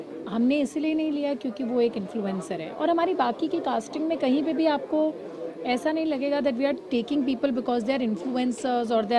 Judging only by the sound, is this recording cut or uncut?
uncut